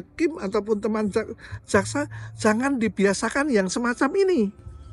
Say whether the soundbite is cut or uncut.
uncut